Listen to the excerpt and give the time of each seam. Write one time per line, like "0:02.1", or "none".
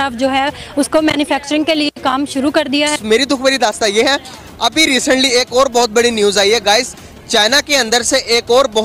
0:03.0